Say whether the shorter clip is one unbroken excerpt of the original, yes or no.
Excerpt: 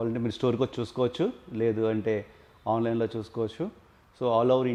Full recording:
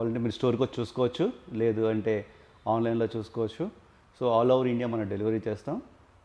yes